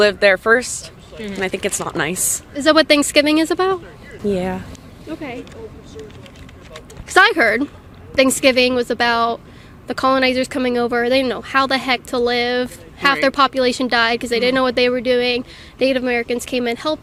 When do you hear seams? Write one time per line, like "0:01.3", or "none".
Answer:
none